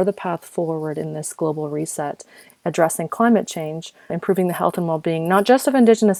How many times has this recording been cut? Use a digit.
2